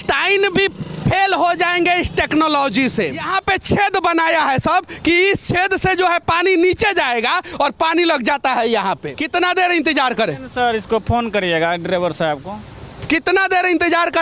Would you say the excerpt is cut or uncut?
cut